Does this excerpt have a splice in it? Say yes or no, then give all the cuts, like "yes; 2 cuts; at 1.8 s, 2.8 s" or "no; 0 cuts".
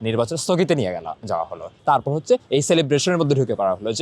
yes; 1 cut; at 1.8 s